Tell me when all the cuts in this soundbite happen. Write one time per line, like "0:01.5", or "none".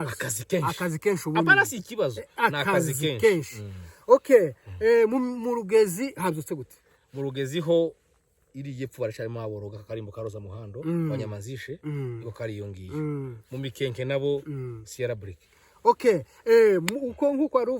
none